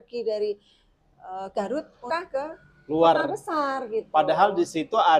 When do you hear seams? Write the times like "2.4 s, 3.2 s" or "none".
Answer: 2.0 s